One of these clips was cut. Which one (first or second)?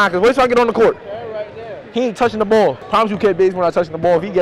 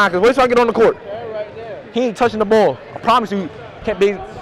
first